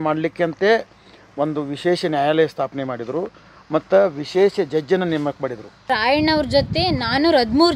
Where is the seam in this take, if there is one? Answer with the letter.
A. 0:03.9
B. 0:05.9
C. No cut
B